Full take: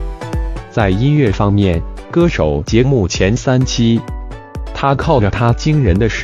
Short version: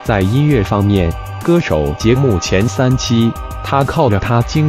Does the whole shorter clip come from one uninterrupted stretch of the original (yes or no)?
no